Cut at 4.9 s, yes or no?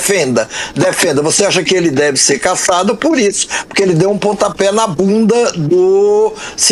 no